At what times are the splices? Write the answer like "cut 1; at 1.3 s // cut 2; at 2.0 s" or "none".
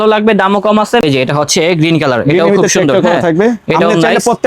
cut 1; at 1.0 s